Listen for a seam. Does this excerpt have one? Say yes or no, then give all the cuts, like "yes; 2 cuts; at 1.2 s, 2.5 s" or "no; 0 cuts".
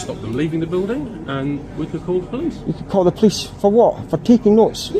yes; 1 cut; at 3.2 s